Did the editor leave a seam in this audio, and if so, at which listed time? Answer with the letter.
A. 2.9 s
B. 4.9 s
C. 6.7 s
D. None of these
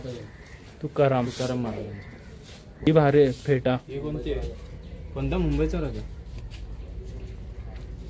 A